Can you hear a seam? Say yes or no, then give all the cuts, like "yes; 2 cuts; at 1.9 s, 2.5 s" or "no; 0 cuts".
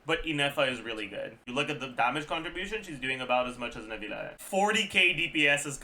yes; 2 cuts; at 1.3 s, 4.3 s